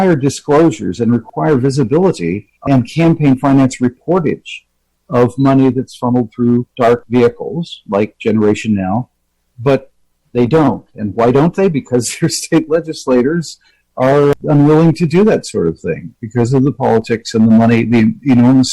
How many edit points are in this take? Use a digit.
3